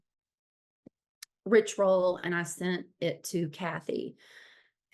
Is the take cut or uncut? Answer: uncut